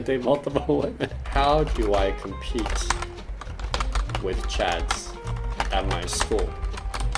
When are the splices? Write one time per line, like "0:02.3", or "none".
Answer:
0:01.2